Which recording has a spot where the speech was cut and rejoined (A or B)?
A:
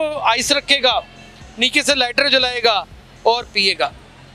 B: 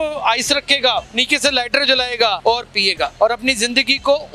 B